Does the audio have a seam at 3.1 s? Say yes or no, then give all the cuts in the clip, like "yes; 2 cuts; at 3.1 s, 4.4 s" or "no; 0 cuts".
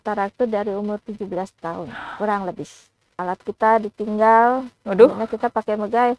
yes; 1 cut; at 3.1 s